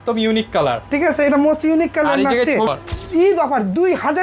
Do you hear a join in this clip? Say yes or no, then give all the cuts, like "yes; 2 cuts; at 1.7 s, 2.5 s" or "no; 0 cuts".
yes; 1 cut; at 2.7 s